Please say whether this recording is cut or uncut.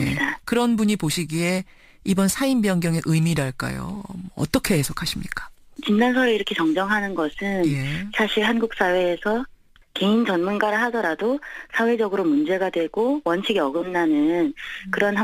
cut